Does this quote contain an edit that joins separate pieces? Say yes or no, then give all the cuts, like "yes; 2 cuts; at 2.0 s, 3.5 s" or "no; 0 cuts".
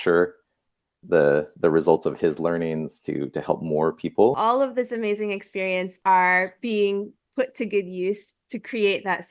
yes; 2 cuts; at 4.4 s, 5.9 s